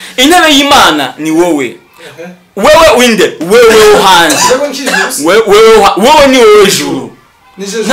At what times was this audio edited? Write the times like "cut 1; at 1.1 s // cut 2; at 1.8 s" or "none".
none